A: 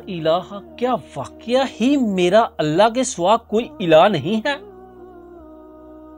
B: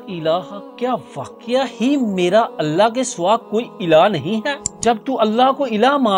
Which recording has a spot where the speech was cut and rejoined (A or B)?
B